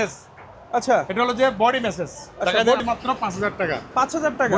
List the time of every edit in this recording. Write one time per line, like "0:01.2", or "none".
0:02.8

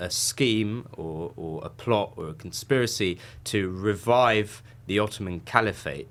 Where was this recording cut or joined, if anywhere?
none

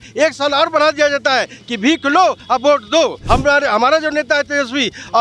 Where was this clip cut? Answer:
0:03.2

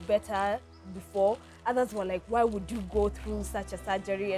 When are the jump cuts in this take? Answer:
none

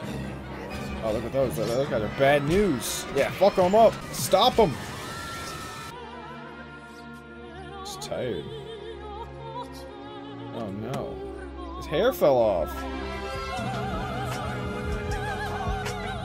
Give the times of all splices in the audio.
0:04.1
0:05.9

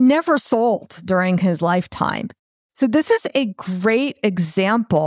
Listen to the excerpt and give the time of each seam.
none

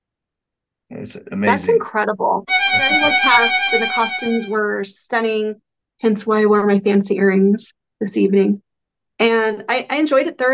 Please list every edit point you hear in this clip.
0:02.9

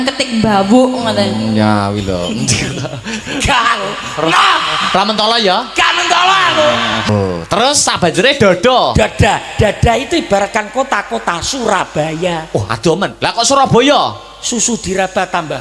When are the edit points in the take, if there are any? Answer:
0:07.1

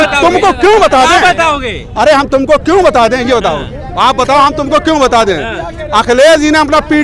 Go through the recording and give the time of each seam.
none

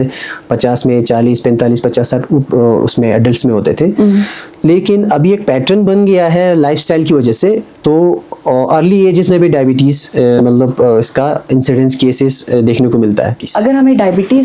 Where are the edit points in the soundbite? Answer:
0:13.5

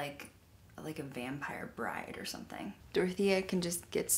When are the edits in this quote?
0:02.8

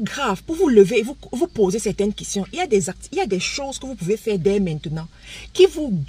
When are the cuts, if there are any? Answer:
none

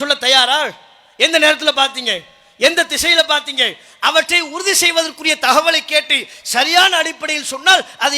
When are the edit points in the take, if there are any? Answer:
none

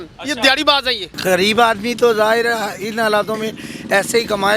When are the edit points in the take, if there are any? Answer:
0:01.1

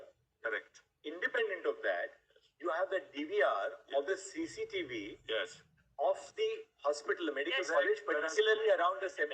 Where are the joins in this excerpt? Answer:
none

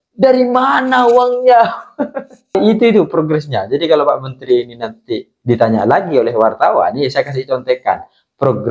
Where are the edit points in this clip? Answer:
0:02.6

